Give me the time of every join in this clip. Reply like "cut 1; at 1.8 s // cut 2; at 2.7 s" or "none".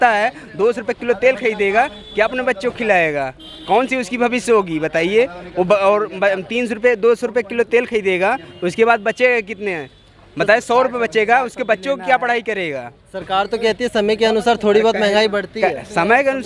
none